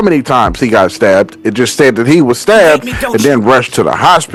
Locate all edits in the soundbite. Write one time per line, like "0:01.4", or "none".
none